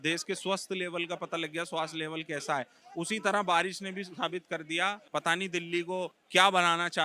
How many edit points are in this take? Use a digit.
2